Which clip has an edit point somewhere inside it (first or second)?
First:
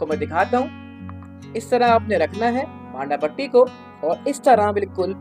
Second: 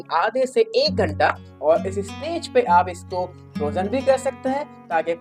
second